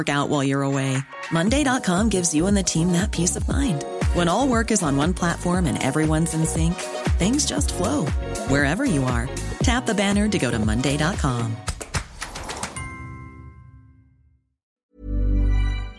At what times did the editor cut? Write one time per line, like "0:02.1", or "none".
0:14.8